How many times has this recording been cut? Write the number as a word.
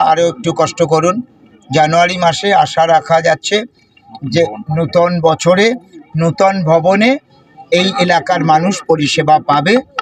zero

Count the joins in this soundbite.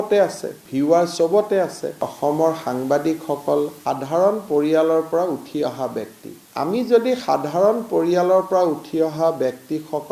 one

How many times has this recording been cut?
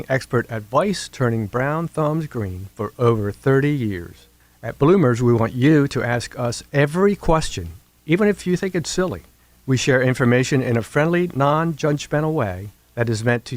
zero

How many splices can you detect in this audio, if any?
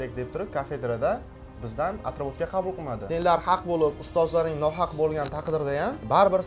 one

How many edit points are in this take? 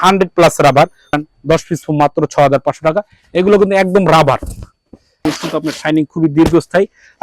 two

